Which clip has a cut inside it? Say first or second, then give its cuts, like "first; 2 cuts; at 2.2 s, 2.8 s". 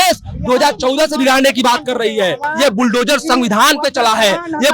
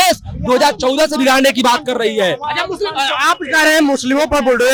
first; 1 cut; at 2.4 s